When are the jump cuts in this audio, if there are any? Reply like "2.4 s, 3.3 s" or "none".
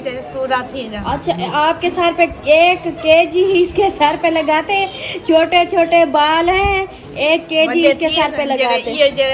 none